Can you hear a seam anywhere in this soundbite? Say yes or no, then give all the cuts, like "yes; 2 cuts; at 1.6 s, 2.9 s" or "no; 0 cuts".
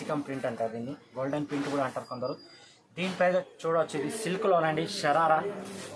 yes; 1 cut; at 3.5 s